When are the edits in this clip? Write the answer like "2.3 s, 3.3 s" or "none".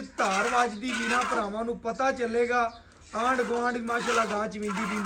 none